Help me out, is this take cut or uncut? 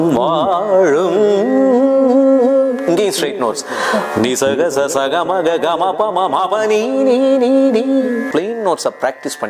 cut